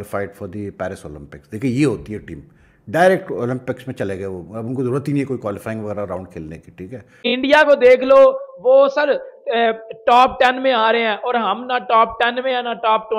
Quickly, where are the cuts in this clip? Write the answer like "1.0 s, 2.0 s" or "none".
7.2 s